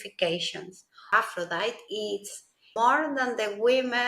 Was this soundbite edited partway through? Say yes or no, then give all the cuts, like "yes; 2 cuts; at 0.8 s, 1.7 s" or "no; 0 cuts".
yes; 2 cuts; at 1.1 s, 2.7 s